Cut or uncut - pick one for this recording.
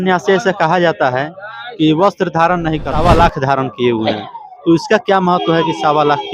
cut